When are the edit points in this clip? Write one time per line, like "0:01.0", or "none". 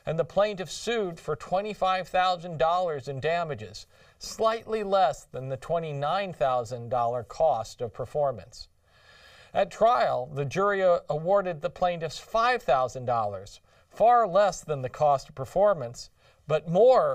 0:06.2